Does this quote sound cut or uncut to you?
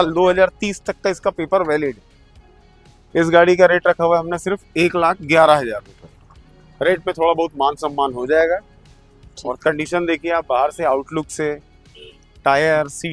uncut